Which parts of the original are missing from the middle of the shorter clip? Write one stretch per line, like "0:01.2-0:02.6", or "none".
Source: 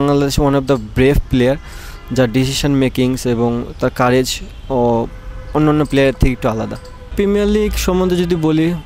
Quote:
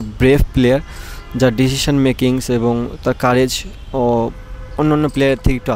none